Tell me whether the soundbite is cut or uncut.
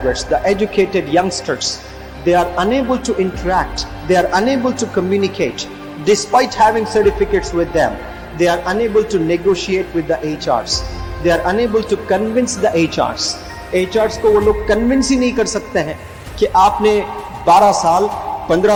uncut